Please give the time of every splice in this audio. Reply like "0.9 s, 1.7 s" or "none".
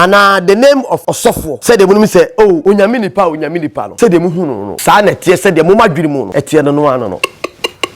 1.2 s, 2.6 s, 3.8 s, 4.7 s, 6.3 s, 7.2 s